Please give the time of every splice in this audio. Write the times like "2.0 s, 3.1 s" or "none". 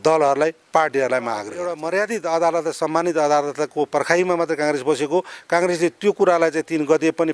1.8 s